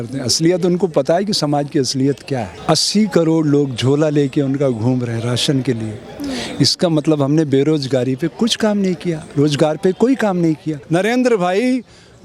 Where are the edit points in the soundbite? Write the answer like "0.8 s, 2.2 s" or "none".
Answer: 2.5 s, 10.7 s